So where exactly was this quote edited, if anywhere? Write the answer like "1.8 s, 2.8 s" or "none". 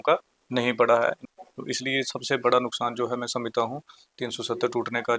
1.2 s